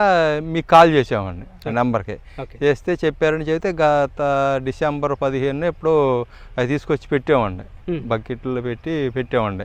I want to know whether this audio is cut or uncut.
uncut